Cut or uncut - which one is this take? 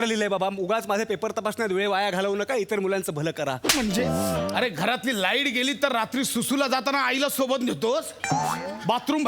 cut